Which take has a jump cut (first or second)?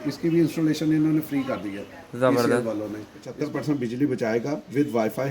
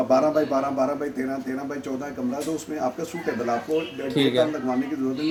first